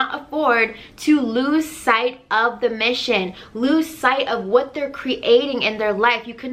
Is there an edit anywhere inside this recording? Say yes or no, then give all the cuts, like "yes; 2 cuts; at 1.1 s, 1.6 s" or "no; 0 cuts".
no; 0 cuts